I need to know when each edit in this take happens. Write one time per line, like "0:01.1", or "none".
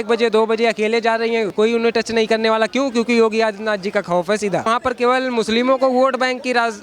0:01.5
0:04.7

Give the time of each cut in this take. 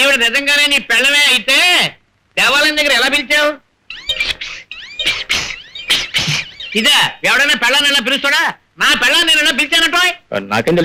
none

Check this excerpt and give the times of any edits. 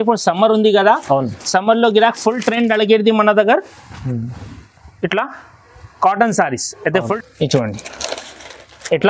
0:07.0

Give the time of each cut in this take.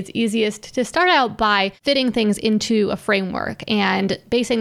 0:01.7

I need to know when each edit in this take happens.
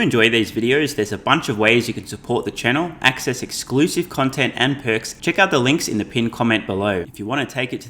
0:05.1
0:07.1

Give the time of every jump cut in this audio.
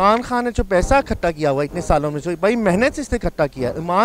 none

